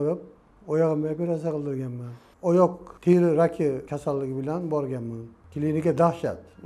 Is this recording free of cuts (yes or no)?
no